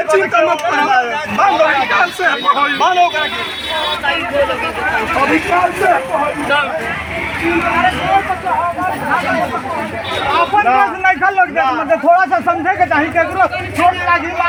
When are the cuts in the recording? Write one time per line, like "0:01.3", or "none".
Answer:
none